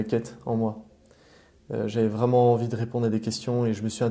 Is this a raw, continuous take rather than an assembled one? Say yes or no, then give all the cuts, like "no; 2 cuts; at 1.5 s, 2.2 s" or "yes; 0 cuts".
yes; 0 cuts